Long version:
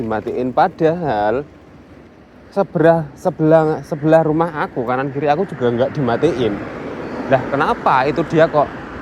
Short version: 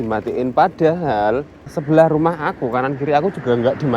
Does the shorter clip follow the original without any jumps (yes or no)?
no